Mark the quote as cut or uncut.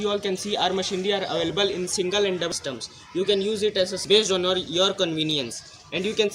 cut